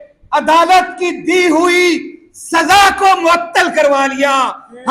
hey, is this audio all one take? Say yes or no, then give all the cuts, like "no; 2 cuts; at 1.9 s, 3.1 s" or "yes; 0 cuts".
yes; 0 cuts